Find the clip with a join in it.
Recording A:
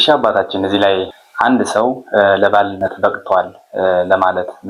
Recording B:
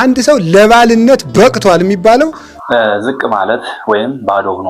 B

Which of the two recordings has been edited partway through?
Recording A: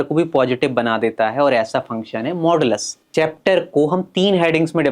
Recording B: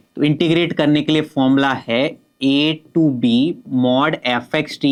A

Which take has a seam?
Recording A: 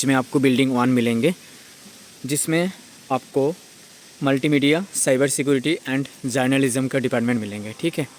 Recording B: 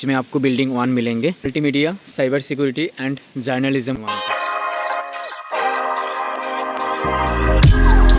B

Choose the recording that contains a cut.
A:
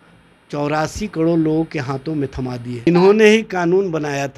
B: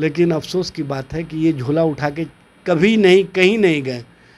A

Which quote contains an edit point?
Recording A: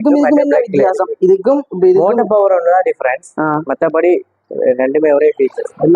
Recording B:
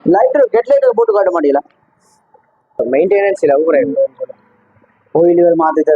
B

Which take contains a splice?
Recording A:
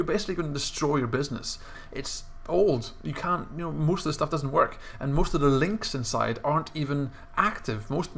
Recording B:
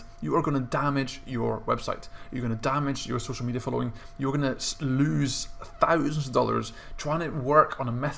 A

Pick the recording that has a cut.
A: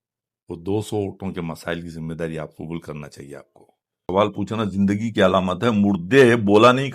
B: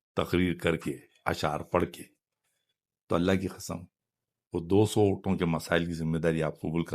A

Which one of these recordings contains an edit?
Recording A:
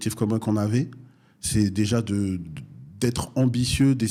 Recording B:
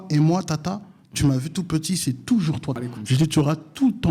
B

